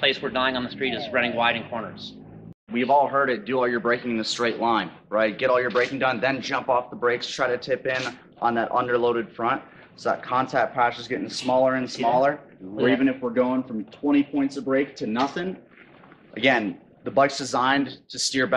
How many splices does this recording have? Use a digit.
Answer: 1